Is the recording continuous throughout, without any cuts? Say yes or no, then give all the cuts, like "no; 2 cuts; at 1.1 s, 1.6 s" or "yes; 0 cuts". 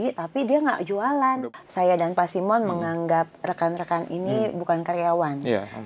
no; 1 cut; at 1.4 s